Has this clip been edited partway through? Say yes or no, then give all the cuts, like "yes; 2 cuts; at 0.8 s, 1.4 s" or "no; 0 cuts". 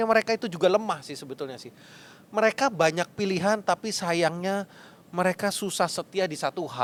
no; 0 cuts